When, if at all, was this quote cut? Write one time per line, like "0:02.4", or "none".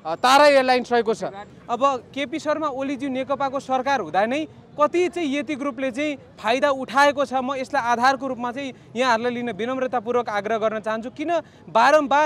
0:01.5